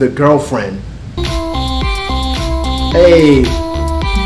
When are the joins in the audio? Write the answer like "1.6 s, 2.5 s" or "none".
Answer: 1.2 s